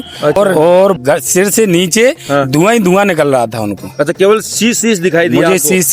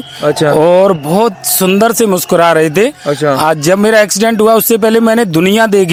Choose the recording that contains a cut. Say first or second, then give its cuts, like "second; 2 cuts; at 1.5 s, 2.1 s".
first; 1 cut; at 1.0 s